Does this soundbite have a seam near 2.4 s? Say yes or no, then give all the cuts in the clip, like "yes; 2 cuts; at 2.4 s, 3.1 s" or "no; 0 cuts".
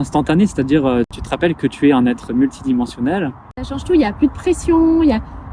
no; 2 cuts; at 1.2 s, 3.8 s